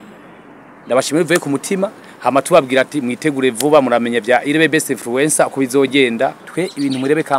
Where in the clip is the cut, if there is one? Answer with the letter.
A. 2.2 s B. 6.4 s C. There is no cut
B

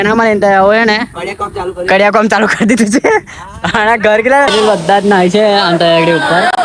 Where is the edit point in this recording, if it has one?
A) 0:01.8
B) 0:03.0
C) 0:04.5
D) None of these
C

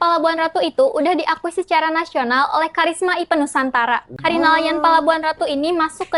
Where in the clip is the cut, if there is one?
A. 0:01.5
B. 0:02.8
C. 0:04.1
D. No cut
C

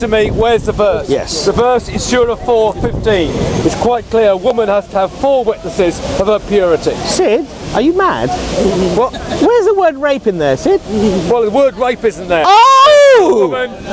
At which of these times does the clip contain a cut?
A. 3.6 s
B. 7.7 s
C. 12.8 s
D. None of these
A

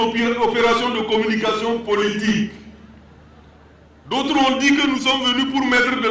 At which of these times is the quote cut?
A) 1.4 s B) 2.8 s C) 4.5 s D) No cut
B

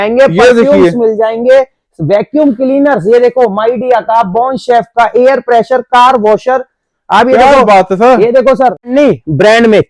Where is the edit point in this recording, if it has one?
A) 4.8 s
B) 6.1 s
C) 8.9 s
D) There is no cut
C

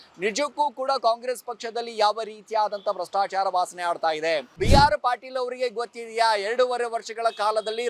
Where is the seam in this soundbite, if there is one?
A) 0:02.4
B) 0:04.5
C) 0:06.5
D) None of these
B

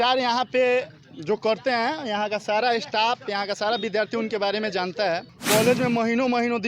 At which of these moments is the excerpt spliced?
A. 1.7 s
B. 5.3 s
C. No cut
B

